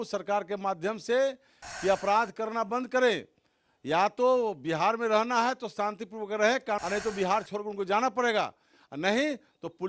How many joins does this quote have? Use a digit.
1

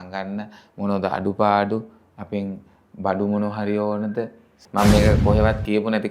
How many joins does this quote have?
1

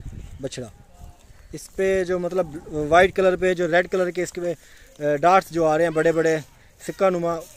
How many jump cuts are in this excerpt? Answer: 0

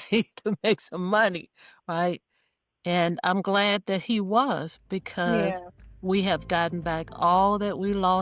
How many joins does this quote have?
0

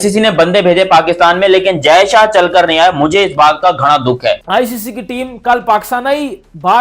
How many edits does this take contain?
1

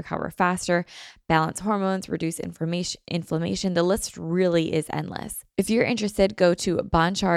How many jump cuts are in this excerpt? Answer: 1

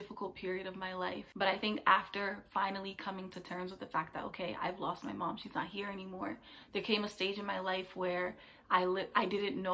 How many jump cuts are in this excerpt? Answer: 1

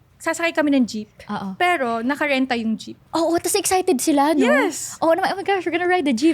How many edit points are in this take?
1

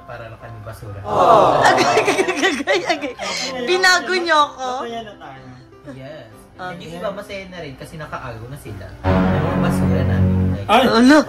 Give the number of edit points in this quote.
2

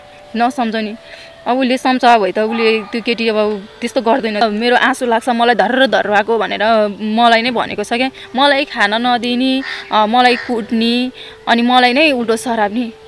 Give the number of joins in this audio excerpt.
1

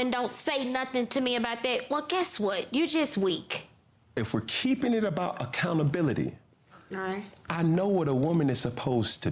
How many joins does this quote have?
1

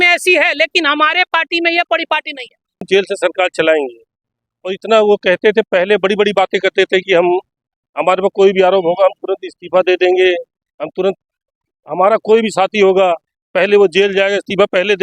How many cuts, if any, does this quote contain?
1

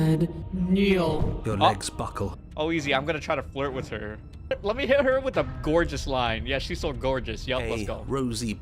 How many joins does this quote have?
2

